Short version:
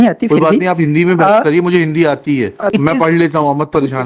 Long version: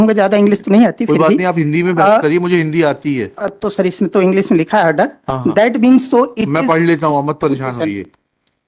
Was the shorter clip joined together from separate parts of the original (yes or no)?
yes